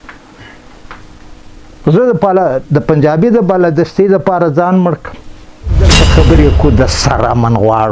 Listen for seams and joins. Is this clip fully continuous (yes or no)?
no